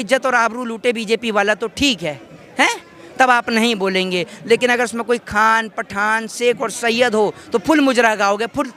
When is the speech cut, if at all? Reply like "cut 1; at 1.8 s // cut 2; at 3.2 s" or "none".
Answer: none